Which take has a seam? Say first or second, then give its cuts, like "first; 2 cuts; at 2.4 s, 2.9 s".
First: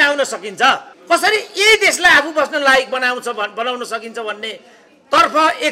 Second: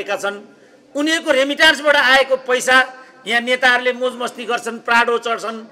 first; 1 cut; at 0.9 s